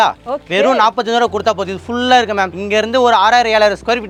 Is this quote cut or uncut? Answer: uncut